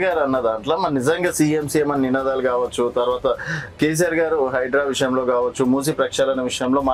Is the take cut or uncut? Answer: uncut